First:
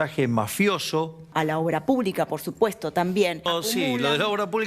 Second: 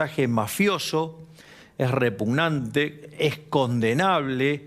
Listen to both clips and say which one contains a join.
first; 2 cuts; at 1.3 s, 3.5 s

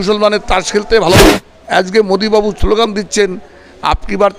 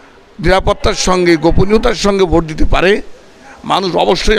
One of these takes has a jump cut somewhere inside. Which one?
first; 1 cut; at 1.3 s

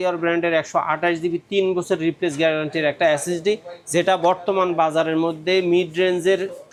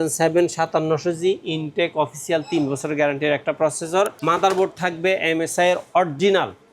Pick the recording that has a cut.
second; 1 cut; at 4.2 s

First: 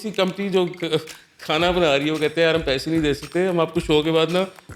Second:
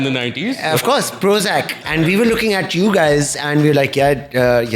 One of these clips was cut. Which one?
second; 1 cut; at 1.8 s

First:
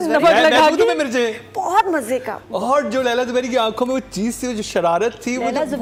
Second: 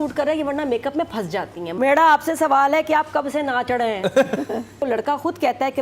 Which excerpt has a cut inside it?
second; 2 cuts; at 1.7 s, 4.8 s

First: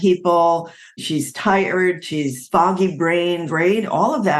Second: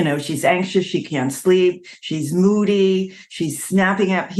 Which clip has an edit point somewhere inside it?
first; 2 cuts; at 1.0 s, 2.4 s

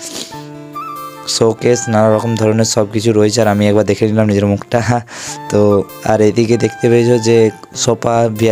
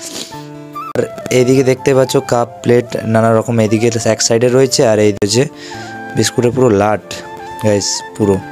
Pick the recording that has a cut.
second; 2 cuts; at 1.0 s, 5.2 s

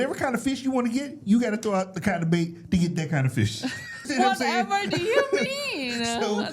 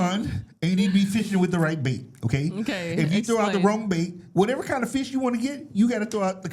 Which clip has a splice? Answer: first; 1 cut; at 4.1 s

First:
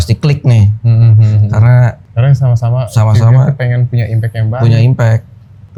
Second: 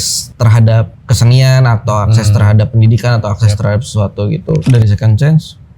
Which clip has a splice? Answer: second; 2 cuts; at 1.0 s, 4.7 s

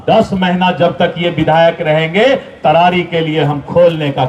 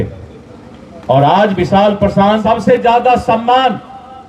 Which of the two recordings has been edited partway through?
second; 1 cut; at 2.4 s

